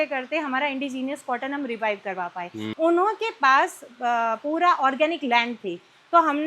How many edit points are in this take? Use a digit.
1